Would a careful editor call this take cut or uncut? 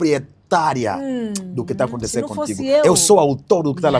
uncut